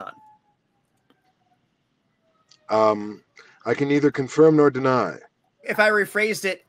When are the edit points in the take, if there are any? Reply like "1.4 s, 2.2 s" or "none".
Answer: 5.7 s

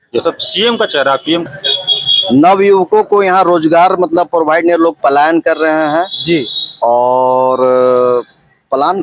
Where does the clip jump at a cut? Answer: 1.4 s

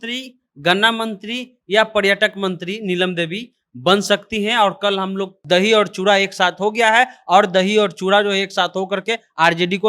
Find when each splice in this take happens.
5.3 s

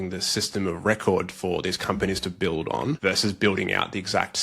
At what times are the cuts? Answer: 3.0 s

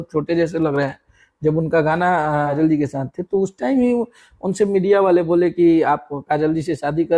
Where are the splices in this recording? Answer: 2.5 s

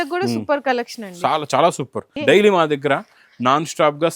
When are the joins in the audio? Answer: 2.1 s

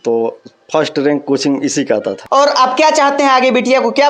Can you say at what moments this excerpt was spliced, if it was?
2.2 s

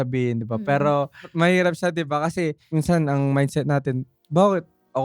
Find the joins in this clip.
1.2 s, 2.6 s

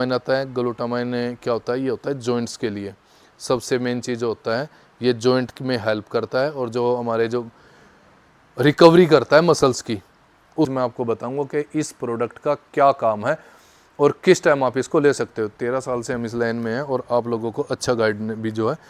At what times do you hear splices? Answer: 10.7 s

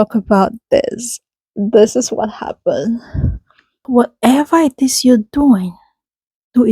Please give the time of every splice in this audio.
3.8 s

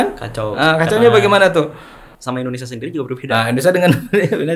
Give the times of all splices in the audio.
2.1 s

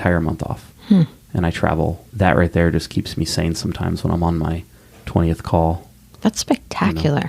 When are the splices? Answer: 2.0 s

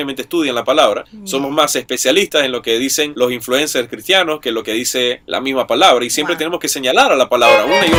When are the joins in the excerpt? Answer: none

